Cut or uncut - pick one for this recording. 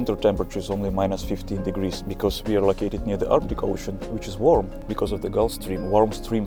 uncut